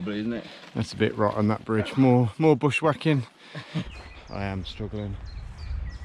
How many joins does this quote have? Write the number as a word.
one